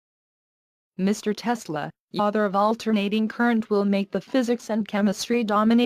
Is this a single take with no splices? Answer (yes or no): yes